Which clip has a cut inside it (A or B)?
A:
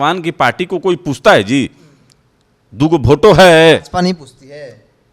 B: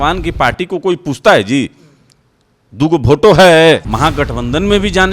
B